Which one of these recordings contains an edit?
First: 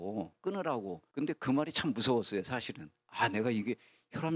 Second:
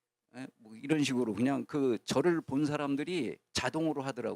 first; 1 cut; at 1.0 s

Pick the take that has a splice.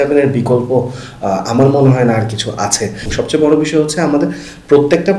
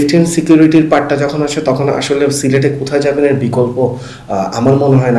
first; 1 cut; at 3.1 s

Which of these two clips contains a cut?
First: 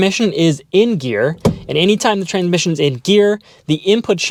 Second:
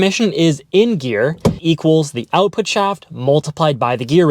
second; 1 cut; at 1.6 s

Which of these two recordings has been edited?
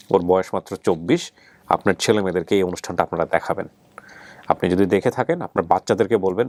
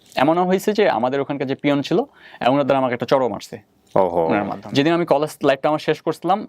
second; 1 cut; at 4.6 s

